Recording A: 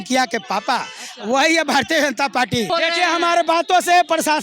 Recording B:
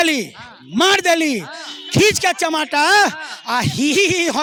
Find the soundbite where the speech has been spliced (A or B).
A